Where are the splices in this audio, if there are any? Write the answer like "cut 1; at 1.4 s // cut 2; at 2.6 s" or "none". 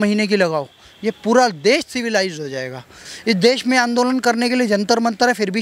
cut 1; at 2.9 s